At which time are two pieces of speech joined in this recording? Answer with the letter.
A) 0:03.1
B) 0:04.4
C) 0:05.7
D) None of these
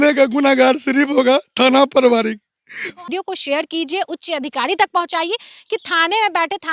A